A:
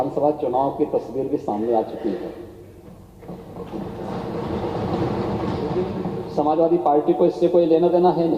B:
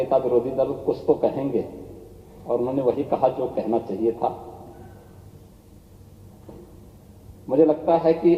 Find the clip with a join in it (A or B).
A